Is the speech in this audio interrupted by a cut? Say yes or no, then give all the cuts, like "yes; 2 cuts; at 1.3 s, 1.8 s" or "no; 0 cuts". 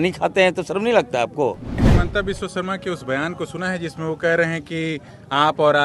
yes; 1 cut; at 1.8 s